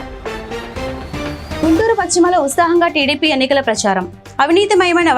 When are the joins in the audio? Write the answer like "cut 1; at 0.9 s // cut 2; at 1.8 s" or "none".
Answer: cut 1; at 1.6 s

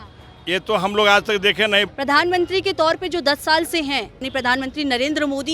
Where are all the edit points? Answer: cut 1; at 1.9 s // cut 2; at 4.3 s

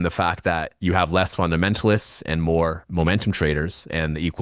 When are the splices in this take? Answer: none

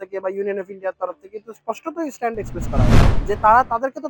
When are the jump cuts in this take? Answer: cut 1; at 3.1 s

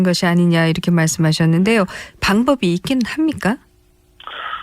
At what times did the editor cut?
none

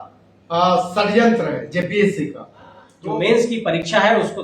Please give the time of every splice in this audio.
cut 1; at 2.9 s

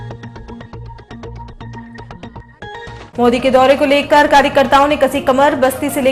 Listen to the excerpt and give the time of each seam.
cut 1; at 3.1 s

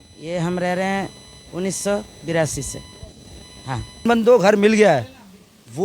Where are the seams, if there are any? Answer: cut 1; at 4.1 s

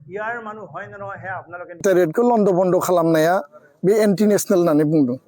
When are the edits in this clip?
cut 1; at 1.8 s

